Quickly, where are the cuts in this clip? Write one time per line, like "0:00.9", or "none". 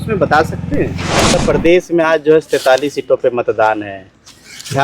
0:01.4

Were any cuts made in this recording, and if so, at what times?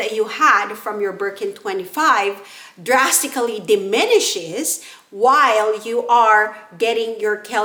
none

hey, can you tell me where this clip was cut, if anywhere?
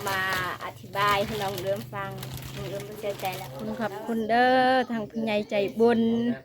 0:03.6

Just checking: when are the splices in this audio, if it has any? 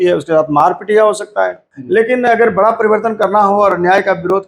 0:01.7

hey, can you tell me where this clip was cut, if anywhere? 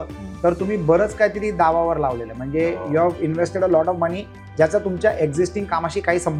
none

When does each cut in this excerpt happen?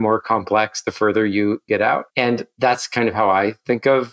0:01.9

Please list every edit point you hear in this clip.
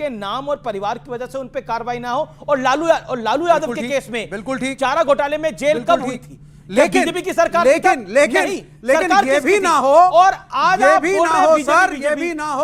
none

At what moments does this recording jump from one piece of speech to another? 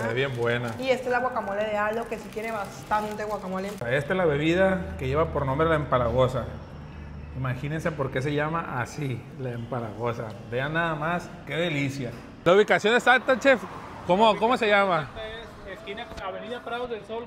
0:03.8
0:12.5

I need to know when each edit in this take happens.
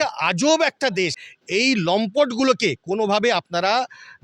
0:01.2

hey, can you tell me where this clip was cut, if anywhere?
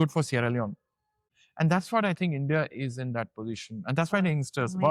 0:01.2

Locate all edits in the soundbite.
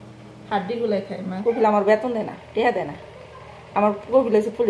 0:01.3

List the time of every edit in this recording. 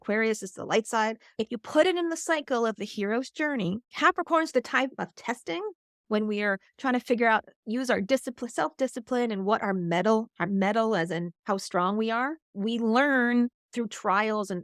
0:01.2
0:03.9
0:11.3
0:12.4
0:13.6

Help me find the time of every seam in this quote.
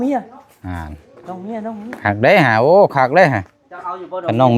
none

